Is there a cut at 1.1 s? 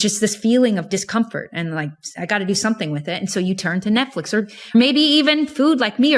yes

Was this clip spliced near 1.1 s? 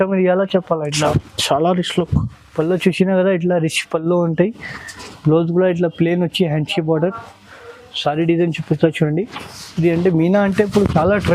yes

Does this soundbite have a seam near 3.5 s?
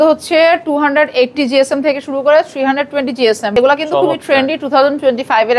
yes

